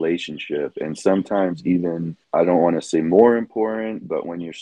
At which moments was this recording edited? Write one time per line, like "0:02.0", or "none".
0:02.1